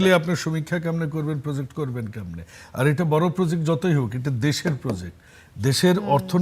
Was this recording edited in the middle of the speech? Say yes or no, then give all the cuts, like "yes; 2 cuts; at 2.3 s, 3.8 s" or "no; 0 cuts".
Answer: no; 0 cuts